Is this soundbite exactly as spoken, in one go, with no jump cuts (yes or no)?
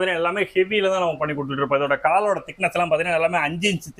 yes